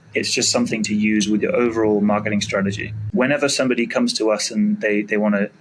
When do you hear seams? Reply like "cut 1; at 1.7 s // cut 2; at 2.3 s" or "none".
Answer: cut 1; at 3.0 s

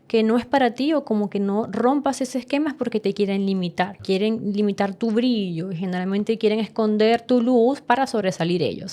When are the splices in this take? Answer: cut 1; at 4.0 s

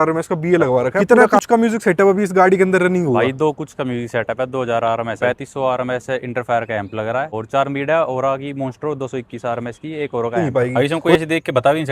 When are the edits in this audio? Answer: cut 1; at 1.0 s // cut 2; at 5.2 s // cut 3; at 7.3 s // cut 4; at 10.4 s

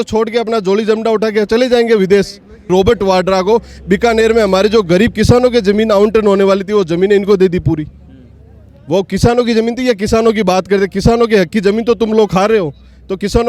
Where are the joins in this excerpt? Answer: cut 1; at 2.7 s

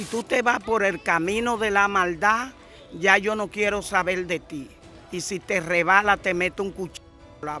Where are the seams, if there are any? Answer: none

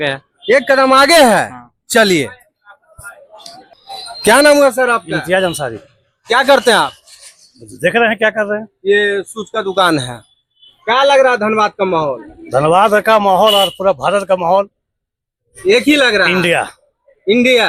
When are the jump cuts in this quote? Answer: none

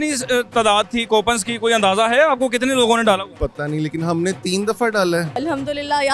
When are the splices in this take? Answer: cut 1; at 3.3 s // cut 2; at 5.4 s

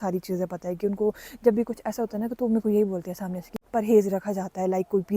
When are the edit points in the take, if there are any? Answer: cut 1; at 3.5 s

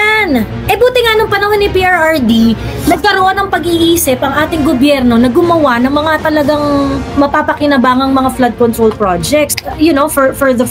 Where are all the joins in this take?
none

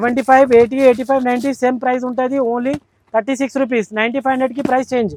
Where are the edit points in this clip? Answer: none

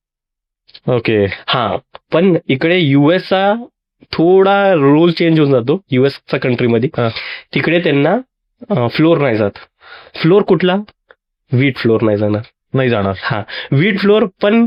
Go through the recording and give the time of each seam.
none

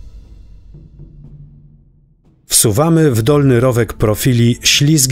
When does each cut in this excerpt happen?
cut 1; at 2.4 s

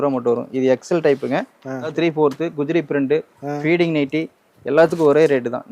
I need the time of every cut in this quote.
cut 1; at 1.9 s

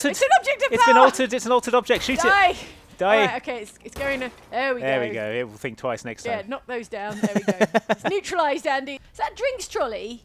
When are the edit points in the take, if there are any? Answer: cut 1; at 9.0 s

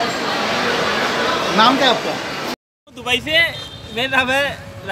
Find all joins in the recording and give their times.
cut 1; at 2.5 s

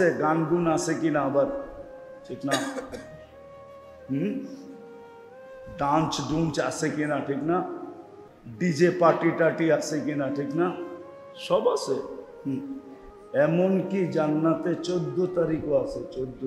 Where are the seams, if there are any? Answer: none

